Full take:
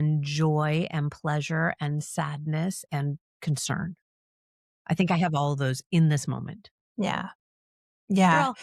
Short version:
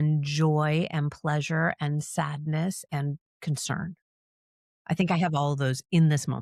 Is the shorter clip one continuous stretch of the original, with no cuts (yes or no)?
yes